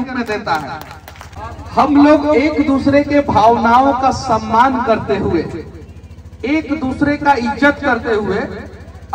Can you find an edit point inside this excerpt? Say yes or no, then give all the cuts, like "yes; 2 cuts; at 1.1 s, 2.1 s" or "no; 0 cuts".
yes; 1 cut; at 1.5 s